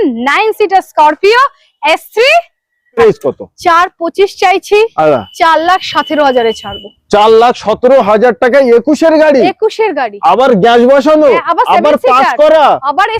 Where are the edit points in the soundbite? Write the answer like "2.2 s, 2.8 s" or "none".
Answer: 3.0 s